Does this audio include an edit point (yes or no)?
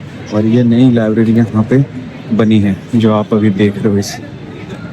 no